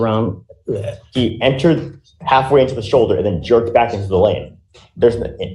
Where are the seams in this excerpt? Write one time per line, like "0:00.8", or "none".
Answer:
0:01.0